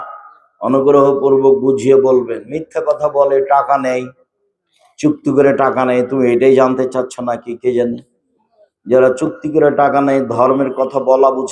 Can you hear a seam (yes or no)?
no